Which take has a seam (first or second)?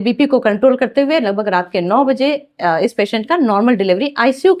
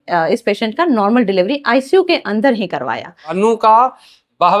second